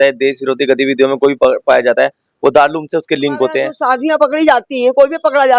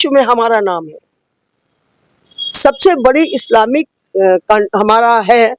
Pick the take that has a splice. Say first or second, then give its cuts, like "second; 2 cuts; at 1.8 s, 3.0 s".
first; 1 cut; at 3.7 s